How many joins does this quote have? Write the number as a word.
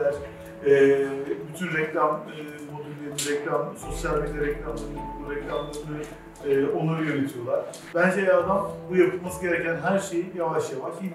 one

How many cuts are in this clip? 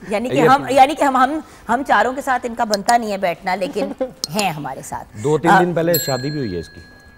zero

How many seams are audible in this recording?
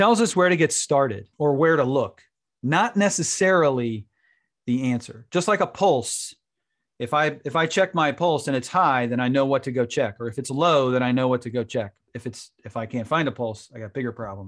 one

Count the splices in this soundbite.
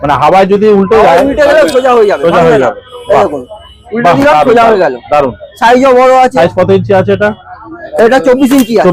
zero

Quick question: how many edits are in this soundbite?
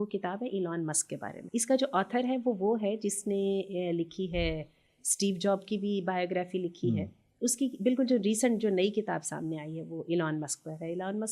two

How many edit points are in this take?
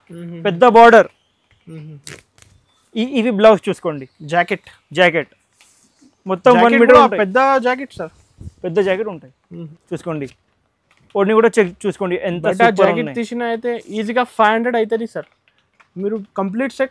one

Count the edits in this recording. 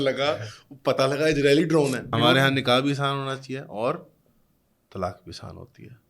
one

